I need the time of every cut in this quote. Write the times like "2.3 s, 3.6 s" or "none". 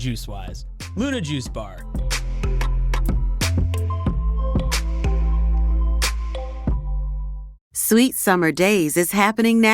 7.5 s